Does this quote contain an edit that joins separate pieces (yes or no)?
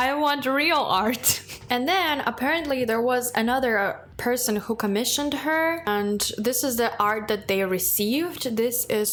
no